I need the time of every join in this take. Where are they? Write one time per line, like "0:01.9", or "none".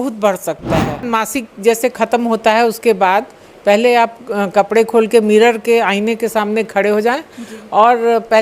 0:01.1